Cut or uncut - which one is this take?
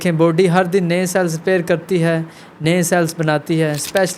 uncut